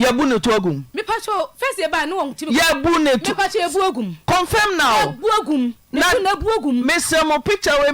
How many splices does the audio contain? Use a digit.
0